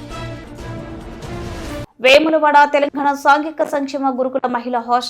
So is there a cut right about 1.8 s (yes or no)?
yes